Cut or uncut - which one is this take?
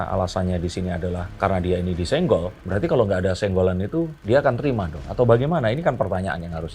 uncut